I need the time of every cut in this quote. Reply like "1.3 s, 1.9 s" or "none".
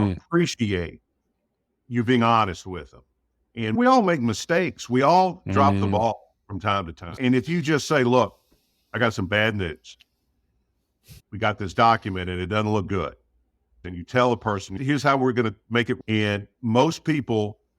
3.8 s, 7.2 s, 11.3 s, 13.8 s, 14.8 s